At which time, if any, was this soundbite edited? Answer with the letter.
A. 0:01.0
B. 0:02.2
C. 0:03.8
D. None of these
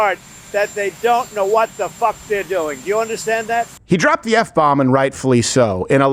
C